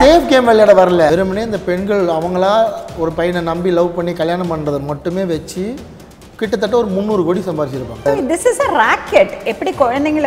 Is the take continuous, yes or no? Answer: no